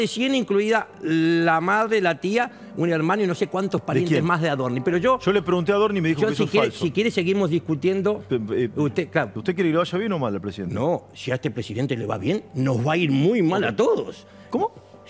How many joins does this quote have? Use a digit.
1